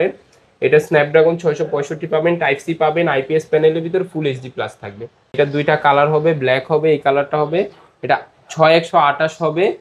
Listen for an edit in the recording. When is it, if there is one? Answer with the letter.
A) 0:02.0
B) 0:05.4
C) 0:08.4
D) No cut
B